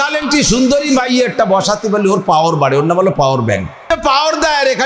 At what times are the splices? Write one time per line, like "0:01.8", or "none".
0:03.8